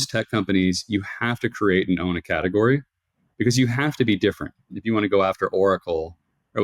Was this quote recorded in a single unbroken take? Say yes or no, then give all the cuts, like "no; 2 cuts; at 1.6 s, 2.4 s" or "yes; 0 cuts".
no; 1 cut; at 4.8 s